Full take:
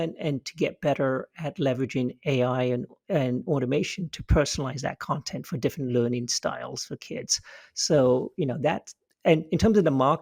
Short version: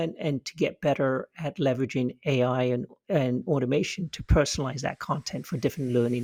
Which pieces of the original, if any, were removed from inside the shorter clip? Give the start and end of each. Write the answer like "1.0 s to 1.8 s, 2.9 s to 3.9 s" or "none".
none